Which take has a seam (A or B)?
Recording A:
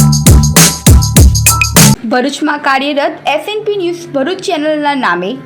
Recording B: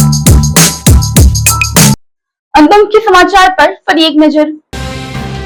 A